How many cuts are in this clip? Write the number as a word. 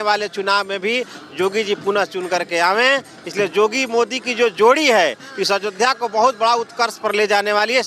zero